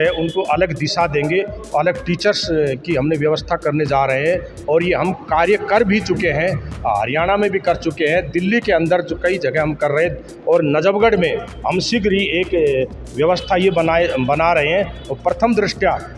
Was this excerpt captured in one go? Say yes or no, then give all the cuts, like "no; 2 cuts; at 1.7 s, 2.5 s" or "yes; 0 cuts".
yes; 0 cuts